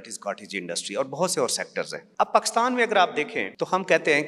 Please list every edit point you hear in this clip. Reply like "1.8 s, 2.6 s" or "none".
2.0 s, 3.4 s